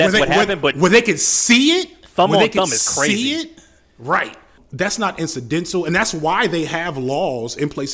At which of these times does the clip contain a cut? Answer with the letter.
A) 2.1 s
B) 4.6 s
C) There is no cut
B